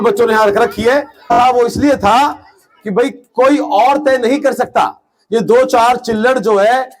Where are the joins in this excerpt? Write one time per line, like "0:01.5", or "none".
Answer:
0:01.3